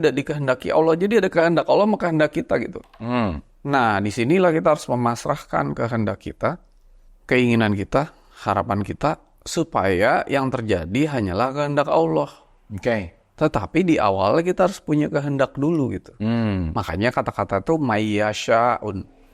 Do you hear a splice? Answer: no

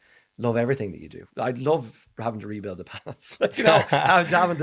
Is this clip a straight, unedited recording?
yes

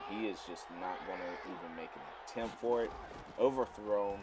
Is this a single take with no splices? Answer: yes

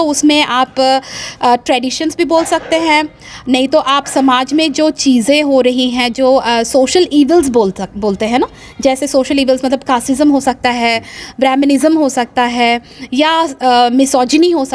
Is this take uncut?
yes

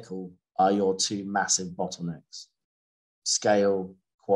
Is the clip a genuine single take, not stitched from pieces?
yes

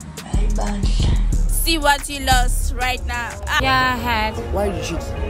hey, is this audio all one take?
no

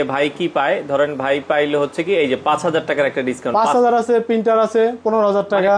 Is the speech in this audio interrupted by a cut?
no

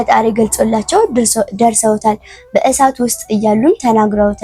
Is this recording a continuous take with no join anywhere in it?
yes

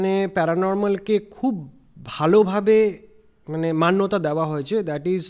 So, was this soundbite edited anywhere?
no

